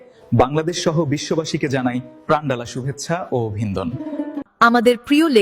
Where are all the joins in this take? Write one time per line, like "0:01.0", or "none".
0:04.4